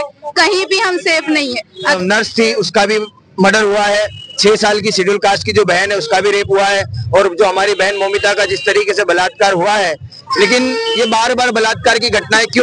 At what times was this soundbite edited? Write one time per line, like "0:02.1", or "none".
0:01.9